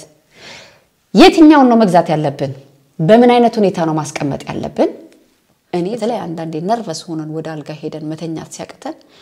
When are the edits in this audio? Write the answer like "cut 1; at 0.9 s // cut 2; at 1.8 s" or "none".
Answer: cut 1; at 5.8 s